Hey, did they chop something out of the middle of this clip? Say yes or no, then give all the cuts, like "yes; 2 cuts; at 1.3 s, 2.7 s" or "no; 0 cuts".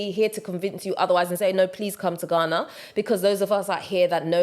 no; 0 cuts